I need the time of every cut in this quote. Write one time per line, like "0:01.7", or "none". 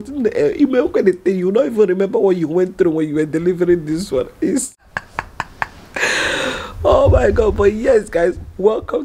0:04.6